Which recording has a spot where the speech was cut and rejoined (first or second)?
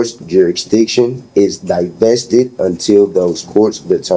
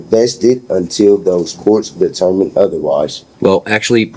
second